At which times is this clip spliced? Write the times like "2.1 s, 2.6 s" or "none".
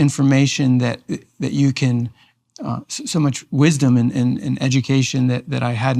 none